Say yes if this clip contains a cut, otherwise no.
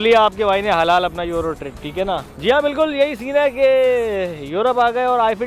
no